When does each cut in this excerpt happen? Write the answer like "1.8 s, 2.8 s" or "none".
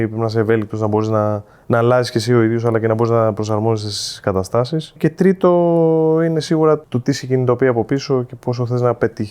5.0 s, 6.9 s